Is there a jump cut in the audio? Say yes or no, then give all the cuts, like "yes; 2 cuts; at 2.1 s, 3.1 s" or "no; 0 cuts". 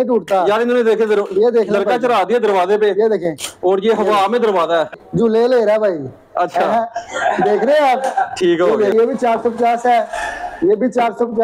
yes; 2 cuts; at 4.9 s, 8.9 s